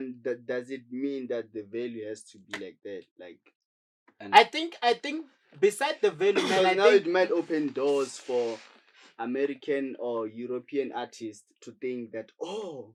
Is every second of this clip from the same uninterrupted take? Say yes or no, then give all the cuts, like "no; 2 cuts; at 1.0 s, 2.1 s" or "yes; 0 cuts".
yes; 0 cuts